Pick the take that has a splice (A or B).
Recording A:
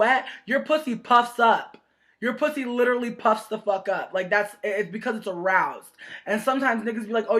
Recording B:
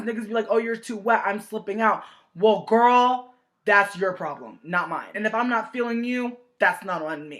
A